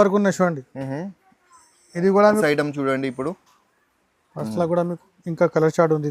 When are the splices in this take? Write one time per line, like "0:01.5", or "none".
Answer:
0:02.4